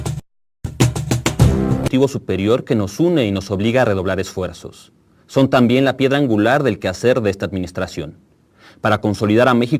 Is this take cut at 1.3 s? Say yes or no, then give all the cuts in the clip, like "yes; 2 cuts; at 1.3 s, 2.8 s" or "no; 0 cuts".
yes; 1 cut; at 1.3 s